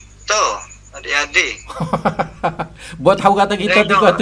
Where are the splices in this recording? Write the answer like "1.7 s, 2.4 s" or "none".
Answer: none